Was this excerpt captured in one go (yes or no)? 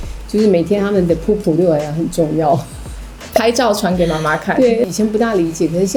yes